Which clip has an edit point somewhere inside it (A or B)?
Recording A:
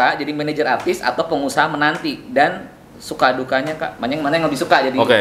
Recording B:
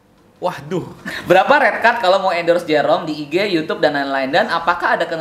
B